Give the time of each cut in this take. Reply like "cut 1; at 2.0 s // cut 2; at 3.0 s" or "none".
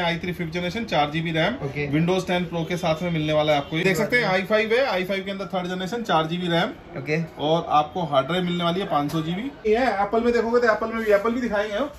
cut 1; at 3.8 s // cut 2; at 9.6 s